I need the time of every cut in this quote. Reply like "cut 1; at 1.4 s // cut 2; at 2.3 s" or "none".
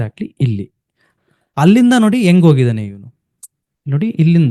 cut 1; at 1.1 s